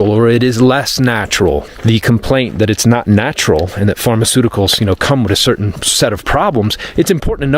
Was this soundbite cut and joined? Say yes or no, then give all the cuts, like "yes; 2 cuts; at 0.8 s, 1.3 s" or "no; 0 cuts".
yes; 2 cuts; at 1.7 s, 5.8 s